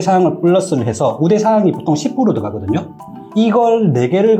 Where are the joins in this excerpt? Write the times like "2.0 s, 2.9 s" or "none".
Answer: 3.2 s